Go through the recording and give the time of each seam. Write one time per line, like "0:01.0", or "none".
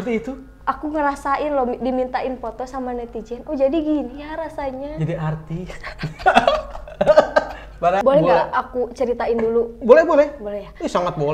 0:08.0